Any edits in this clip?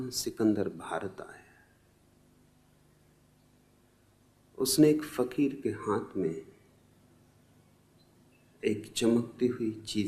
no; 0 cuts

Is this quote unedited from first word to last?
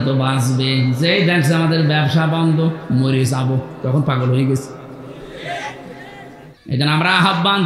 no; 1 cut; at 6.5 s

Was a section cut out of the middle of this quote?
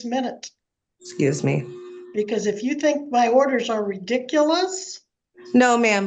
no; 0 cuts

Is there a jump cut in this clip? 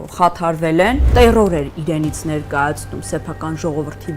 yes; 1 cut; at 1.1 s

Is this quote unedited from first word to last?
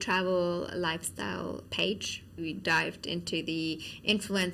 no; 2 cuts; at 1.7 s, 2.4 s

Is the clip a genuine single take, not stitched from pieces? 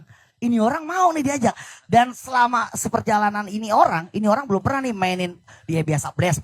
yes; 0 cuts

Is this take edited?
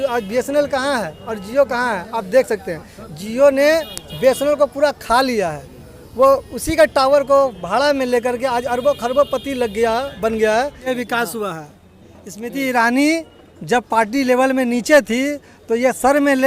yes; 1 cut; at 10.9 s

